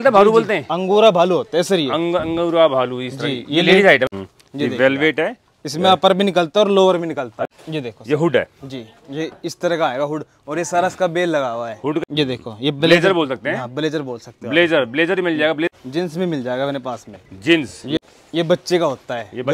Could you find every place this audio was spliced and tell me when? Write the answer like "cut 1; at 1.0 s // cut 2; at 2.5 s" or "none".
cut 1; at 4.1 s // cut 2; at 7.4 s // cut 3; at 12.0 s // cut 4; at 15.7 s // cut 5; at 18.0 s